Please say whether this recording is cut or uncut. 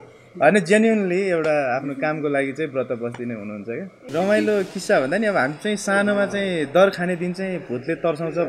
cut